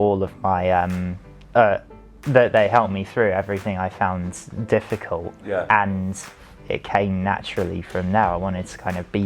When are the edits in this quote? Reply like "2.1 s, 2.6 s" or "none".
6.5 s